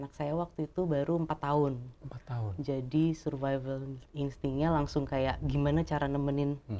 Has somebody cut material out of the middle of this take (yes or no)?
no